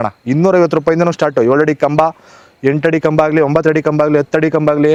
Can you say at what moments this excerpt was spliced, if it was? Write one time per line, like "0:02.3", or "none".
none